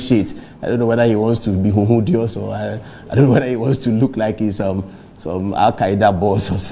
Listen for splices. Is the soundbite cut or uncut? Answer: uncut